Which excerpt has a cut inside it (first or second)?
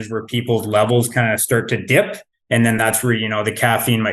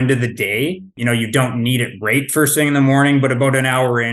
second